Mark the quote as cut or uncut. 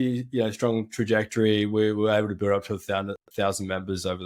uncut